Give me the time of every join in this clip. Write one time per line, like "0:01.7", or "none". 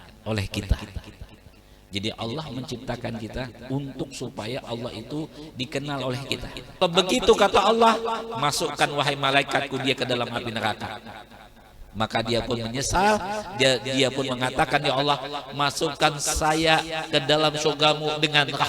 0:06.8